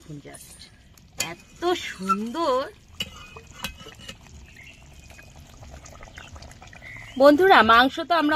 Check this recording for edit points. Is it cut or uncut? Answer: cut